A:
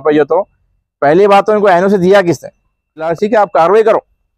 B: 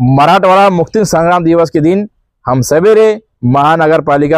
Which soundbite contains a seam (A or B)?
A